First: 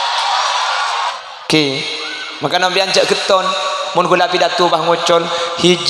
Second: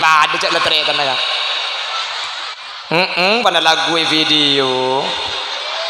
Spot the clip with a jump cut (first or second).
first